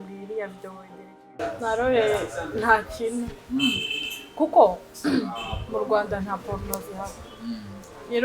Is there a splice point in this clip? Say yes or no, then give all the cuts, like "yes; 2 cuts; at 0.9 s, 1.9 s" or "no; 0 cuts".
yes; 1 cut; at 1.4 s